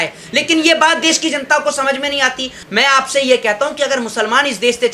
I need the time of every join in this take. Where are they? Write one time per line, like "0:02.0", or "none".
0:02.6